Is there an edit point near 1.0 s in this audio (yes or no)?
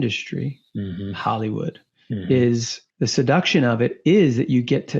no